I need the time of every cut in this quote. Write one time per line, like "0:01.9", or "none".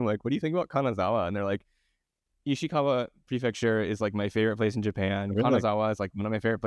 none